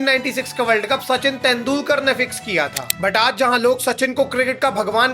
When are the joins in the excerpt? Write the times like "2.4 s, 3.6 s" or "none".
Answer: 2.8 s